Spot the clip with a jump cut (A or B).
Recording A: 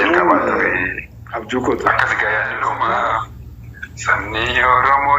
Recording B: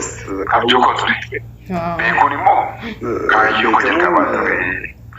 A